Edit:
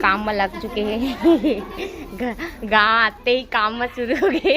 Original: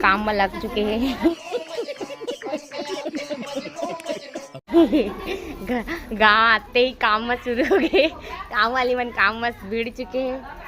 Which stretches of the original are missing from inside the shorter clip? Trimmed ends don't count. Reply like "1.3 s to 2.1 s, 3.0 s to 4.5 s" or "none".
1.2 s to 4.7 s